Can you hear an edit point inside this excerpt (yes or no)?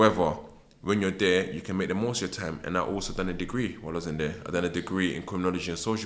no